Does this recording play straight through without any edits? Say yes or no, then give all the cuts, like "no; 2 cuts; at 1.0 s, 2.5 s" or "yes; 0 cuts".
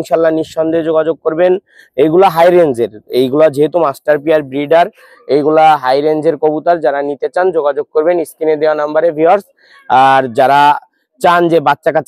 yes; 0 cuts